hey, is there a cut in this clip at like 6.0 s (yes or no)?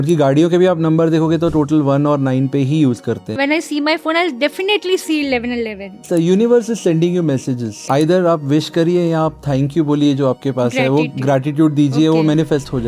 yes